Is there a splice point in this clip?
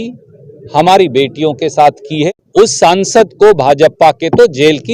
yes; 1 cut; at 2.3 s

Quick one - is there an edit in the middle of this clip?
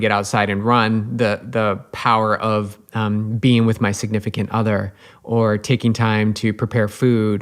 no; 0 cuts

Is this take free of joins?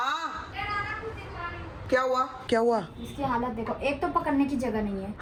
yes; 0 cuts

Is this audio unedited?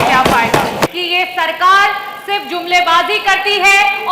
no; 1 cut; at 0.9 s

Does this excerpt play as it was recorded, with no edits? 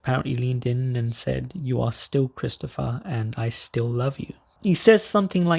no; 1 cut; at 4.4 s

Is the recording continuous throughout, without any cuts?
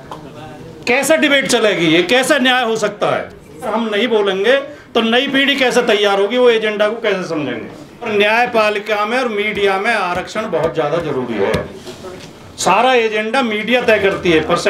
no; 2 cuts; at 3.7 s, 8.1 s

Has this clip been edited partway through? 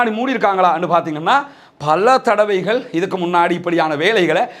no; 0 cuts

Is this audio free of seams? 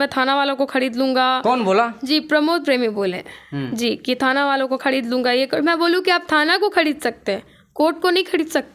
yes; 0 cuts

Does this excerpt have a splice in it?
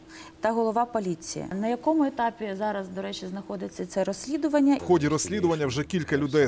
yes; 2 cuts; at 1.5 s, 4.8 s

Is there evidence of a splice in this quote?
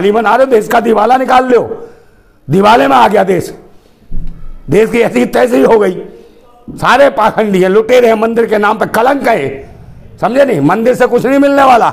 no; 0 cuts

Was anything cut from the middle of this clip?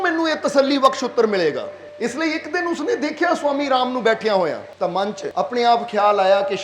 yes; 2 cuts; at 1.8 s, 5.0 s

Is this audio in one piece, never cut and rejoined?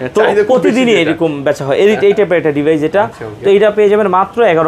yes; 0 cuts

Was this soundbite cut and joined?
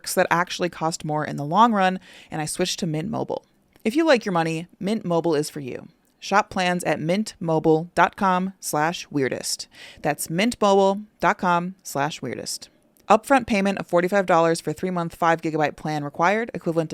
yes; 1 cut; at 3.6 s

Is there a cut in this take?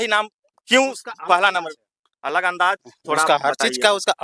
no; 0 cuts

